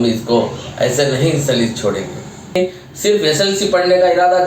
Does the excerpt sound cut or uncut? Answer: cut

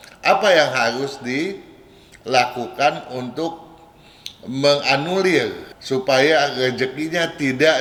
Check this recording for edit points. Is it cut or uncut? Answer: uncut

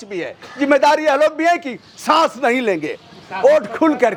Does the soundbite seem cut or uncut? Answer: uncut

